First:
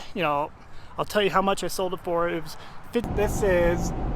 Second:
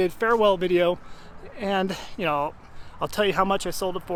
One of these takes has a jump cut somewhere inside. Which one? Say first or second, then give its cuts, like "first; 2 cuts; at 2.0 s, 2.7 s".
first; 1 cut; at 3.0 s